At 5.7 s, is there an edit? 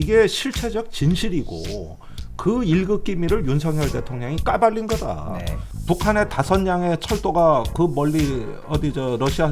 yes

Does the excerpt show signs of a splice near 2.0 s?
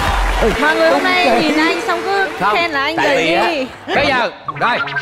no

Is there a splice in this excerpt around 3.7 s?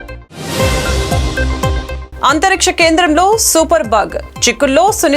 no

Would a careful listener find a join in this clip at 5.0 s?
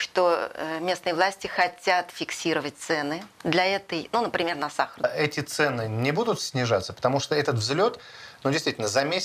yes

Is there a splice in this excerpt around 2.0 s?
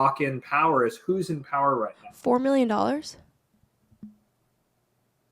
yes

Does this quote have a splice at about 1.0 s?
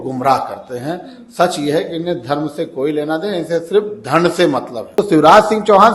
no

